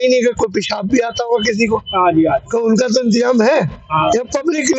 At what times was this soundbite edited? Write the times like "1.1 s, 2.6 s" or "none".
none